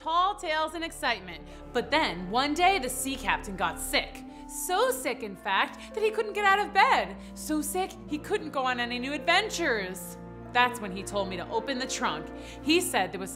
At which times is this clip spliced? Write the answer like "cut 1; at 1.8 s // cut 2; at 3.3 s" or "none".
none